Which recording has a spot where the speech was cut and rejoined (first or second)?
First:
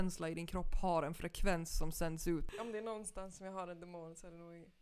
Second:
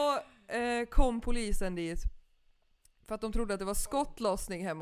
first